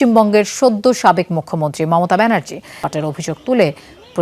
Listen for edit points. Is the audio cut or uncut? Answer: cut